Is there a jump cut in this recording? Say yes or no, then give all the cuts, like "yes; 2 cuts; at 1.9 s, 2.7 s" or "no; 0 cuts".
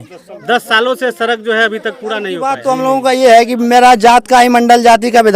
yes; 1 cut; at 2.6 s